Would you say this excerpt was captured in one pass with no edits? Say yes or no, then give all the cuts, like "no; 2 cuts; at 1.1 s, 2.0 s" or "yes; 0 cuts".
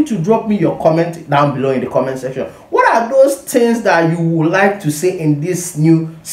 yes; 0 cuts